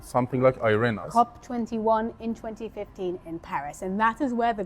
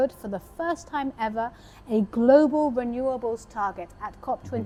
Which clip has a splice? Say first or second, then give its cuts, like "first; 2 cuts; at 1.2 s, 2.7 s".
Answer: first; 1 cut; at 1.0 s